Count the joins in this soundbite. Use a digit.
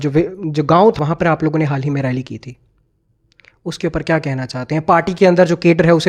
1